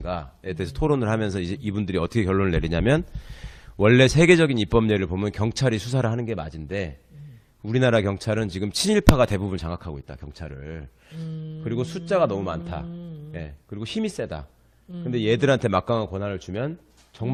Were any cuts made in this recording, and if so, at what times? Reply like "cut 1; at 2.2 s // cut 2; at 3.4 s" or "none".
none